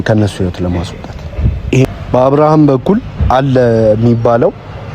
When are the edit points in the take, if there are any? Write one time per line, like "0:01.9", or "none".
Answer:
0:01.8